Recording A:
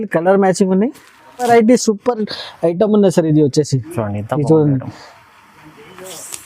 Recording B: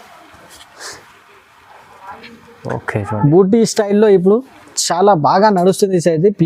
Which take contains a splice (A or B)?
A